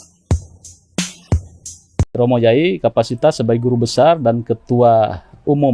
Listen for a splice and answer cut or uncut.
cut